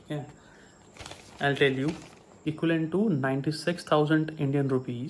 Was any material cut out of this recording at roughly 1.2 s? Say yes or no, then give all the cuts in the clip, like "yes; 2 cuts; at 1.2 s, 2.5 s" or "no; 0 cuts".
no; 1 cut; at 2.4 s